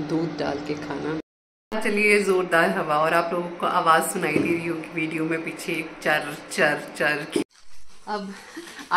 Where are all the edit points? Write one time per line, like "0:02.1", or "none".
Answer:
0:01.2
0:07.4

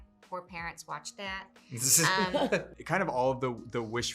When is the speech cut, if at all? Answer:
0:02.7

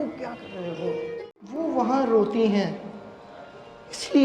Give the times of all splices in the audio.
0:01.3

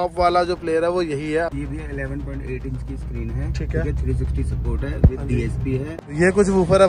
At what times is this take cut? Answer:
0:01.5
0:05.9

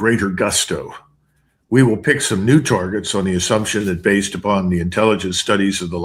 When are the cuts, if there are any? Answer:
0:03.8

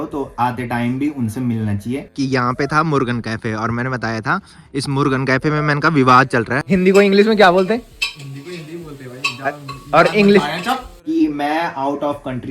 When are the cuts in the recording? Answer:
0:02.1
0:06.6
0:10.9

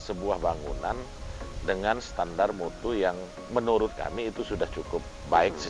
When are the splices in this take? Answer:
none

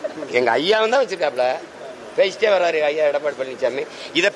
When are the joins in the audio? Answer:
none

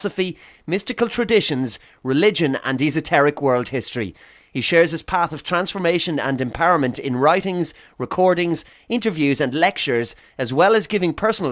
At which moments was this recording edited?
none

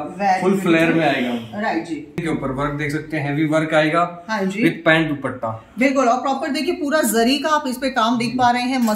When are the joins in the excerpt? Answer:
0:02.2

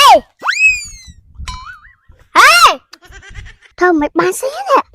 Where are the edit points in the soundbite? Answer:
0:03.6

